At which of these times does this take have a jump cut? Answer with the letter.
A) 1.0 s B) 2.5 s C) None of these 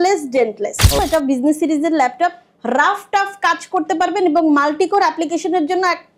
A